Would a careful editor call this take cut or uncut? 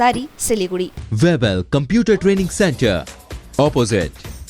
cut